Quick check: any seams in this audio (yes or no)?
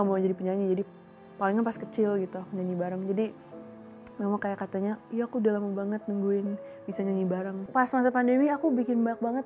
yes